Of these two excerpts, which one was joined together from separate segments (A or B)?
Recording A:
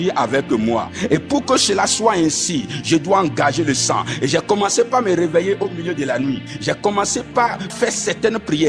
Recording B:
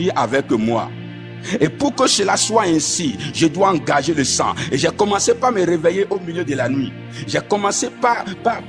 A